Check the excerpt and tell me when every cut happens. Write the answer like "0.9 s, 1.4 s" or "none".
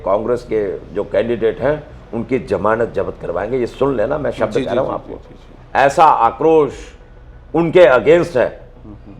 none

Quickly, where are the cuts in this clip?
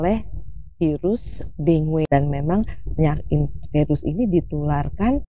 2.1 s

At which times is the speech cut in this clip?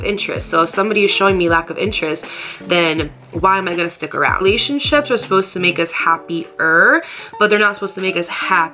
4.4 s

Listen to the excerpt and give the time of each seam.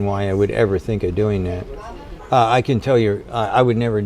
2.1 s

